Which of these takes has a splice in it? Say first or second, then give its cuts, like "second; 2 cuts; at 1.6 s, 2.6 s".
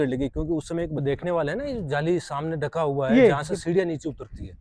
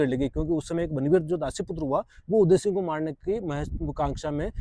first; 1 cut; at 1.0 s